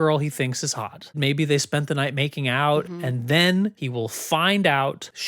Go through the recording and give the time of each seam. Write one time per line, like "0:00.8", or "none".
0:01.2
0:02.9
0:03.8